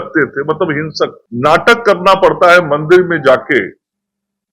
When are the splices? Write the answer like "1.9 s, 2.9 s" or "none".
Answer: 1.2 s